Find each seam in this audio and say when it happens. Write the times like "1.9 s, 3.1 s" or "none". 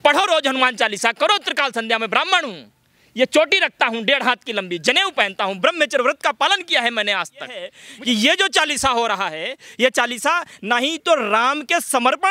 7.8 s